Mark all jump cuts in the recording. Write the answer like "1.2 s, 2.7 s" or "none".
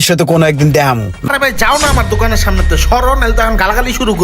1.3 s